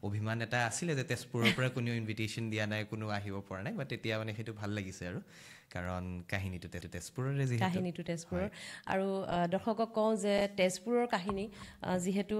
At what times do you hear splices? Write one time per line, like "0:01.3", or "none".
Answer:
none

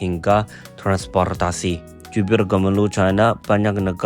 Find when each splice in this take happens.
0:01.9

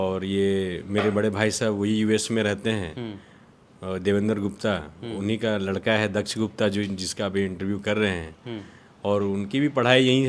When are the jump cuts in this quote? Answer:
none

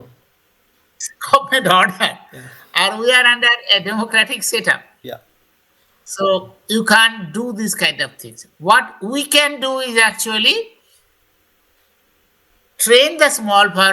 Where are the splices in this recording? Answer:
none

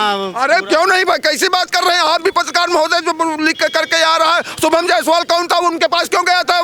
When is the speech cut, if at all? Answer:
none

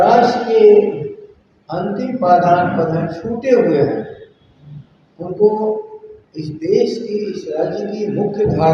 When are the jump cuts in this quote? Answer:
none

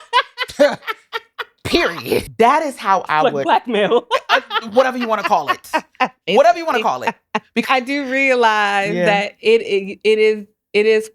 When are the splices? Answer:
0:02.3
0:07.6

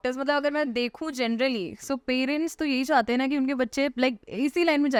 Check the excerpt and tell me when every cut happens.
none

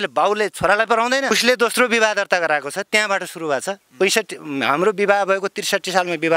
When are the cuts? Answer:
0:01.3

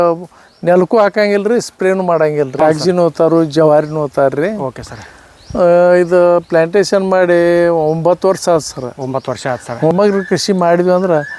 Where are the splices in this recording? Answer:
0:02.5
0:09.9

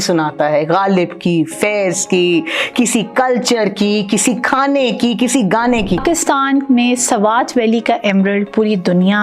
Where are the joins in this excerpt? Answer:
0:06.0

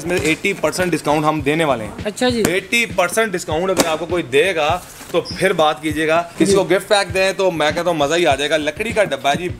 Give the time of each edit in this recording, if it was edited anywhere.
0:06.3

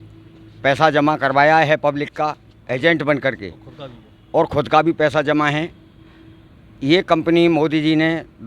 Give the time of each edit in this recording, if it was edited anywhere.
none

